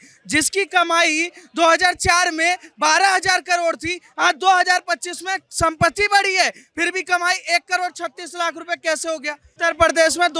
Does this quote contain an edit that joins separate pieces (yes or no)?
yes